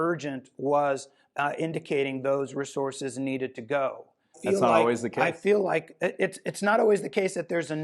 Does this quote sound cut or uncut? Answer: cut